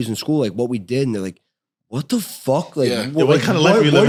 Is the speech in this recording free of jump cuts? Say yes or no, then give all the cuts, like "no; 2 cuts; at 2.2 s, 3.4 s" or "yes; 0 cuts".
yes; 0 cuts